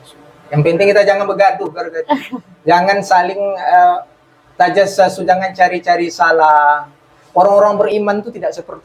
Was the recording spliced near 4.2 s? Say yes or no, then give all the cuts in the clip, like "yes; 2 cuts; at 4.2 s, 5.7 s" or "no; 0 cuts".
no; 0 cuts